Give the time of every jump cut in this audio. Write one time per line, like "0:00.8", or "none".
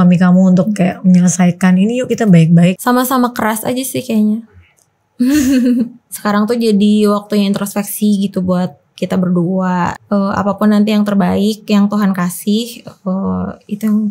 0:02.8
0:06.1
0:09.9